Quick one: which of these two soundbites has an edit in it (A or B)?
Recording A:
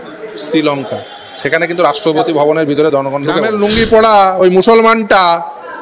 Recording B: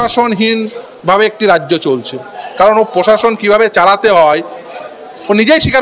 A